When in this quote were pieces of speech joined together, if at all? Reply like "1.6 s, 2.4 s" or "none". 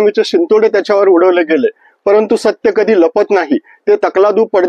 none